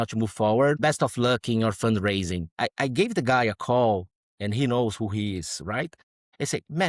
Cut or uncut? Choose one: uncut